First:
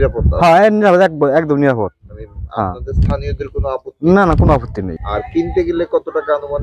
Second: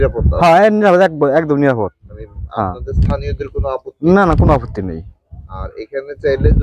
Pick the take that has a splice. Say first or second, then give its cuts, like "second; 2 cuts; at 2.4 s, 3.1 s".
first; 1 cut; at 5.0 s